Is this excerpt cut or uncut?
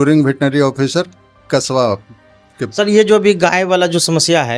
uncut